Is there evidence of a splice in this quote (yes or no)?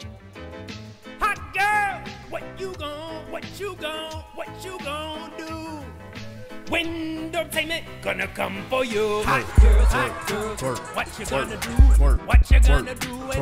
no